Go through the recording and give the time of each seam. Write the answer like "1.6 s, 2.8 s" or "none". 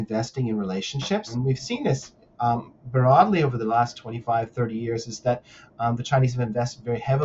1.3 s